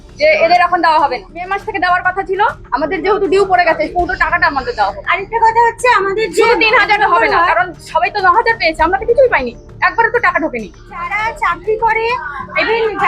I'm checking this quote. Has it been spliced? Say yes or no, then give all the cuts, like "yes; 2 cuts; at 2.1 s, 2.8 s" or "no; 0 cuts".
yes; 2 cuts; at 1.5 s, 11.0 s